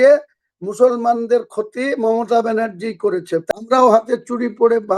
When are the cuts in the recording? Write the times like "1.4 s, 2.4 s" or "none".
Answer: 3.4 s